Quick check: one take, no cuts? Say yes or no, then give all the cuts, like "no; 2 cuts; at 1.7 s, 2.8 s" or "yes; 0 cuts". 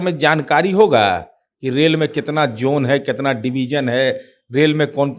yes; 0 cuts